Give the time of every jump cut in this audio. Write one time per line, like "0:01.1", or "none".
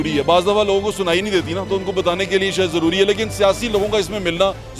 none